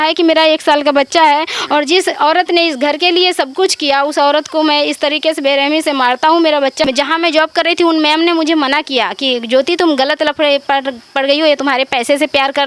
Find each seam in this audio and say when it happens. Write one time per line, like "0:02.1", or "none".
0:06.8